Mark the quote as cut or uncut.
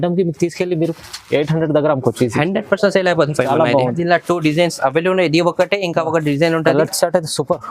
cut